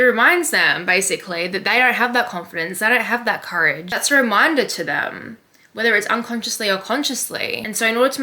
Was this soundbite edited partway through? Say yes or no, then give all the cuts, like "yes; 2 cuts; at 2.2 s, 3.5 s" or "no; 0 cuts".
yes; 1 cut; at 3.9 s